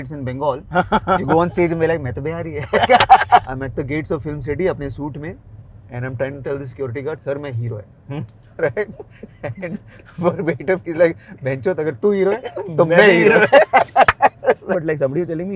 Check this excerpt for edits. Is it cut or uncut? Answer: cut